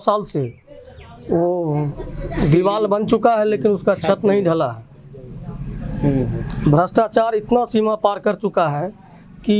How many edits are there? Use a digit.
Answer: 0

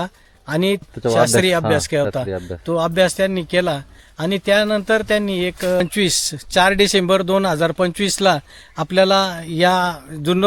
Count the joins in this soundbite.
2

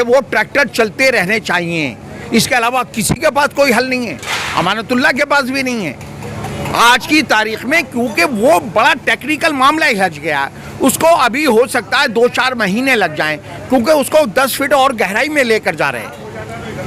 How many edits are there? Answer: 0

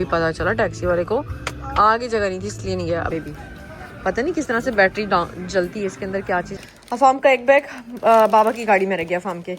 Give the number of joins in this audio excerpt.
2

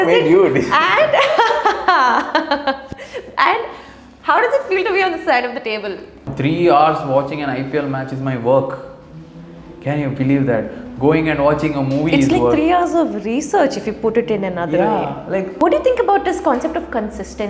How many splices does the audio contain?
2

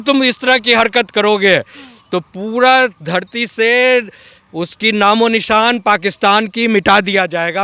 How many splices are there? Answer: 0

